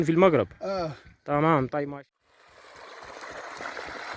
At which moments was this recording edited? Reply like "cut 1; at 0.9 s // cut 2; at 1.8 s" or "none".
cut 1; at 1.9 s

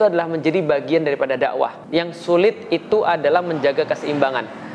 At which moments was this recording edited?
cut 1; at 1.8 s

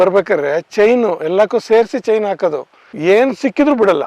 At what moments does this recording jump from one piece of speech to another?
none

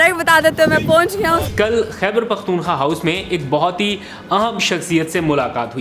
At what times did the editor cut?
cut 1; at 1.4 s

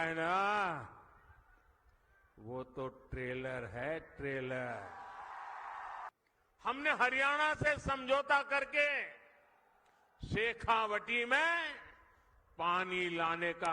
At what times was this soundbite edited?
cut 1; at 6.1 s

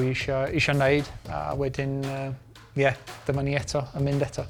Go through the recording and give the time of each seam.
none

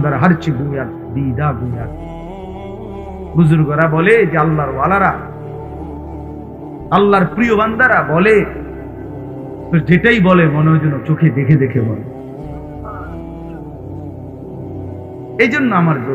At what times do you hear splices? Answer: cut 1; at 1.9 s // cut 2; at 3.3 s // cut 3; at 12.0 s // cut 4; at 14.8 s

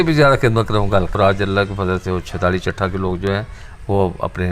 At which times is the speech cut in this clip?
cut 1; at 1.1 s

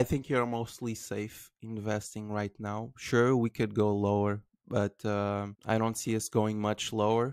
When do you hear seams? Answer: none

